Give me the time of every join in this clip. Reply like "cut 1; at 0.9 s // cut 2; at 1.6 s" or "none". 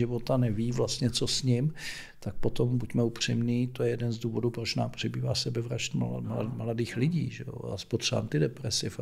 none